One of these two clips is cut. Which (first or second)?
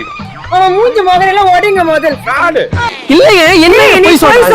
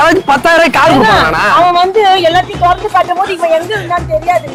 first